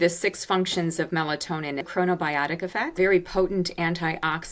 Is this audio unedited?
no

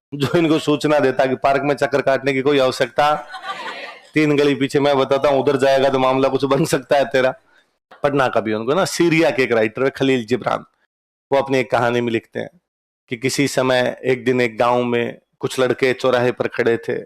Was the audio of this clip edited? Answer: yes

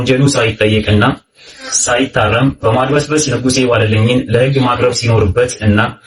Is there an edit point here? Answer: no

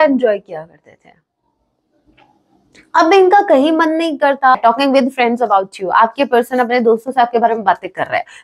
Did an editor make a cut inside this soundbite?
yes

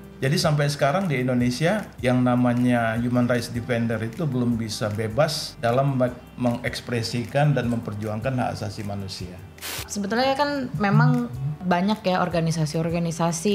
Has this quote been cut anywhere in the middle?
yes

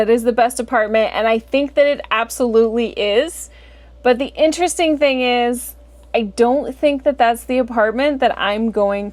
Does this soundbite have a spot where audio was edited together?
no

